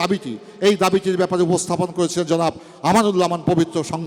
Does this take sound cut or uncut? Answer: uncut